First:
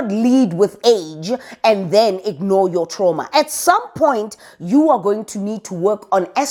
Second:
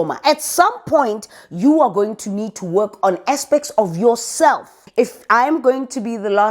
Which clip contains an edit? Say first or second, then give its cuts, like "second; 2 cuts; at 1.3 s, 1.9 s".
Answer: second; 1 cut; at 4.8 s